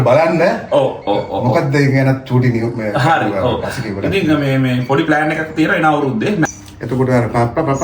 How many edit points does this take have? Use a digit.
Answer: 1